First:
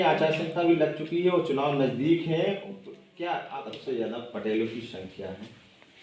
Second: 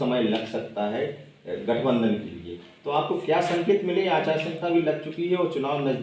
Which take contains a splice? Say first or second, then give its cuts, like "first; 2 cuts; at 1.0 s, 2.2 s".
first; 1 cut; at 3.5 s